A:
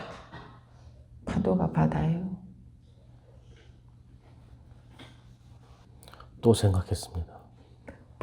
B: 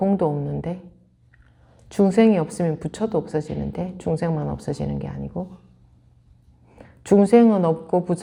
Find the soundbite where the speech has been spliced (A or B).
A